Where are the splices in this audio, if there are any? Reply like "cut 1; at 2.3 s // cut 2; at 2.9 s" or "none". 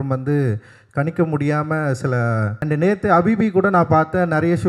cut 1; at 2.6 s